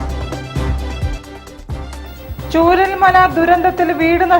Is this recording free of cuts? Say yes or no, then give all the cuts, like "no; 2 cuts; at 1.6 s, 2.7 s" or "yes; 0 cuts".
yes; 0 cuts